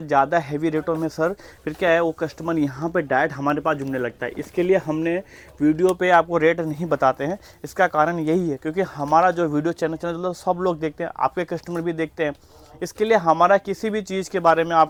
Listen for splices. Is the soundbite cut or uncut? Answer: uncut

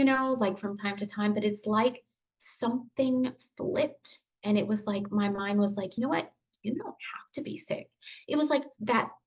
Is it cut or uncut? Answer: uncut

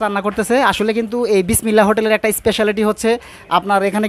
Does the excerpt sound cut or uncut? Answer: uncut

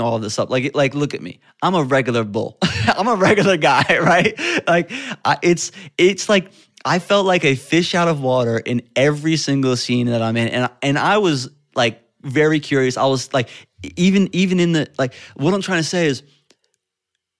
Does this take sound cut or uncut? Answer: uncut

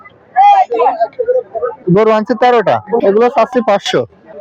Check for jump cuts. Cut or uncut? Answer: cut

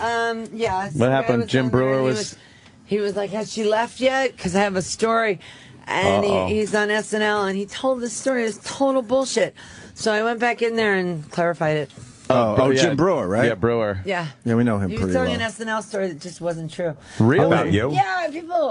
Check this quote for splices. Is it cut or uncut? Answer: uncut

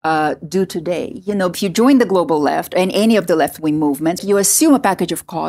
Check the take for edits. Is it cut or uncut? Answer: cut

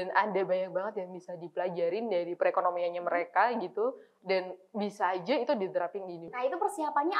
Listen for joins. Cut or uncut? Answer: cut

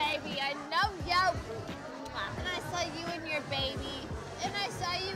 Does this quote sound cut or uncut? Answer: uncut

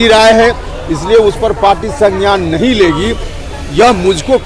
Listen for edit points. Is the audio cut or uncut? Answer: uncut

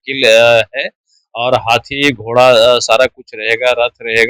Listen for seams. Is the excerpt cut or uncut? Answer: uncut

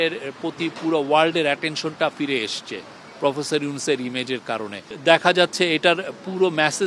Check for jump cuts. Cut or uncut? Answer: uncut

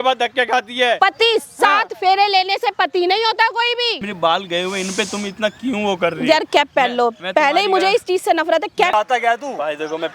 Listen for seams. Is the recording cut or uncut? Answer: cut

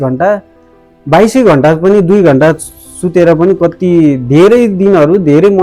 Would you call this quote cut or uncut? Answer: uncut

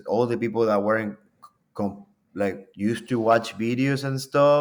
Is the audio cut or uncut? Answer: uncut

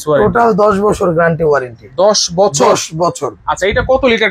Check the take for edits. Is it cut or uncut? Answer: uncut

